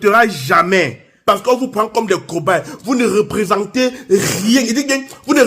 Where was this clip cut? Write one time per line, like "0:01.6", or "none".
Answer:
0:01.0